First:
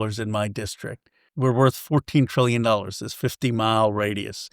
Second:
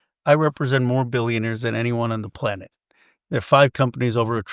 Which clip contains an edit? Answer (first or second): first